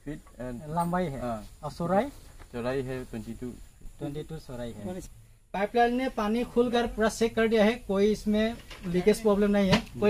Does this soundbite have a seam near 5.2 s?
yes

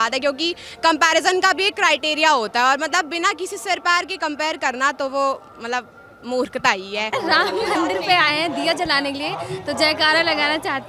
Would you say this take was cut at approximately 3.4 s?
no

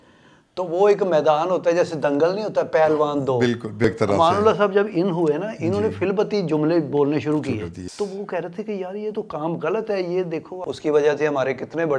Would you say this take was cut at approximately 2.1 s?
no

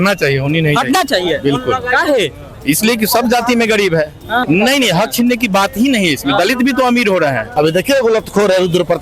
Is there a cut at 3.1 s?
no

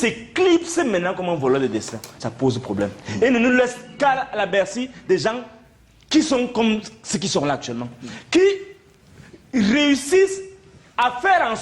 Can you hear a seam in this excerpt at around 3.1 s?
no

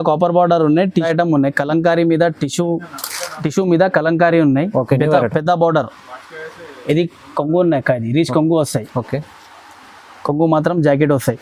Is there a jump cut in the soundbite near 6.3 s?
no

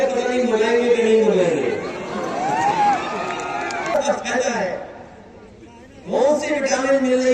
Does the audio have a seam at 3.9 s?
yes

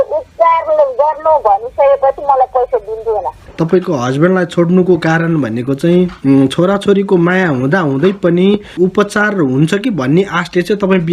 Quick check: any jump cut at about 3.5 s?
yes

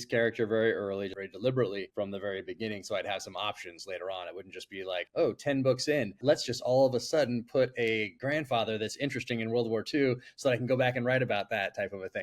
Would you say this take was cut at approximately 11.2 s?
no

